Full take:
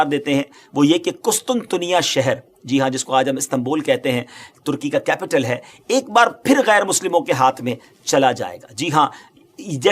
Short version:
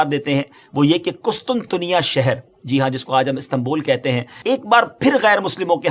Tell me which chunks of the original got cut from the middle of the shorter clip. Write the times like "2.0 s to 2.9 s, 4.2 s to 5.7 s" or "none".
4.3 s to 5.7 s